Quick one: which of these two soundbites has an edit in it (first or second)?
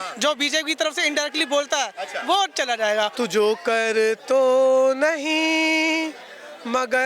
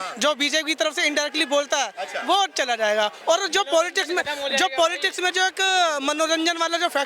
first